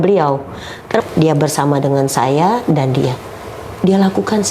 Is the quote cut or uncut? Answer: cut